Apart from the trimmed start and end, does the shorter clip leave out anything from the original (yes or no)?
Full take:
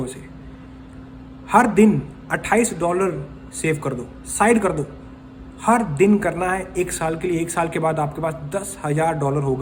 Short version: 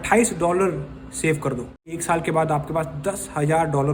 yes